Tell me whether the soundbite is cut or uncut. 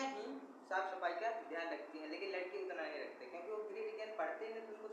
uncut